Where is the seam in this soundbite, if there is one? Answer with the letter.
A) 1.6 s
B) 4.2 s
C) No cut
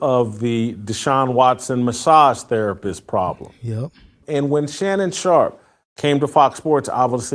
B